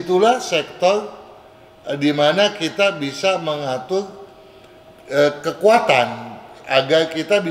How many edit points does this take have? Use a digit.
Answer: 0